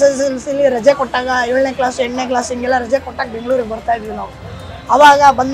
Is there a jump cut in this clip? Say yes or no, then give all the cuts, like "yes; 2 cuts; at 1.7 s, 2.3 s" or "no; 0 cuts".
no; 0 cuts